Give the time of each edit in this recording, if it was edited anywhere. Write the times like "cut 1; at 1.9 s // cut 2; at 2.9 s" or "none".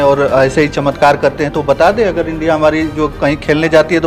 none